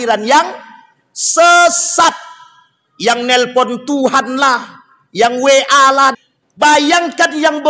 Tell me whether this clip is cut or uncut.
cut